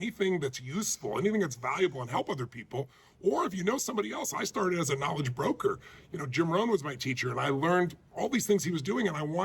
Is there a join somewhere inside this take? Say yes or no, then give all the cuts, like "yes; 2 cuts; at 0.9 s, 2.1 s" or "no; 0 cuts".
no; 0 cuts